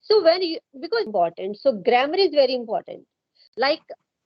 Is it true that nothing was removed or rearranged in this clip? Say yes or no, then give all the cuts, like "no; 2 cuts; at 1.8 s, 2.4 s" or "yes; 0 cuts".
no; 1 cut; at 1.1 s